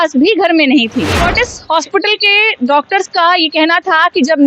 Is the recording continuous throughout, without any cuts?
no; 1 cut; at 1.2 s

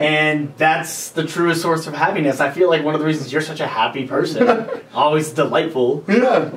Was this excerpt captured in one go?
yes; 0 cuts

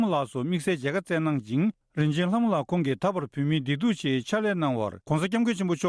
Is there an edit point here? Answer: yes; 2 cuts; at 1.8 s, 5.0 s

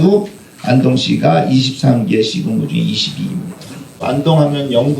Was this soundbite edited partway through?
yes; 1 cut; at 4.0 s

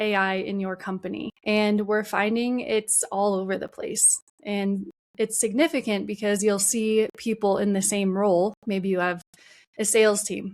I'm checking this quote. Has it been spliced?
yes; 1 cut; at 1.3 s

